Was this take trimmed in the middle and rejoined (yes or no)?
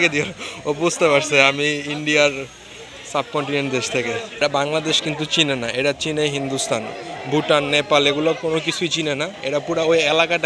yes